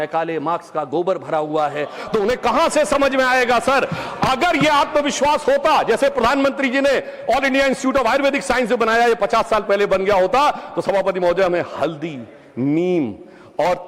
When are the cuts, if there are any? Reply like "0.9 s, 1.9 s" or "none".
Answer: none